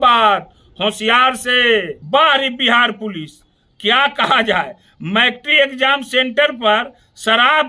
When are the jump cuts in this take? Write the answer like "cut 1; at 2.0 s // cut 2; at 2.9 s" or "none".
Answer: cut 1; at 2.0 s